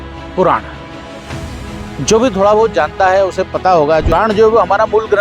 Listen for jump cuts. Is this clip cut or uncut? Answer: cut